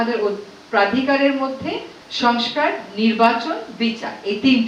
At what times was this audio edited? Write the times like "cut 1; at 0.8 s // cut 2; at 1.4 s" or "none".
cut 1; at 2.0 s